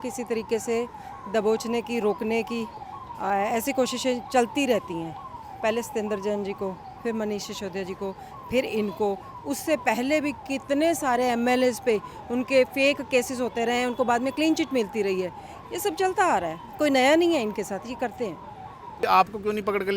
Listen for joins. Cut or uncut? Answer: cut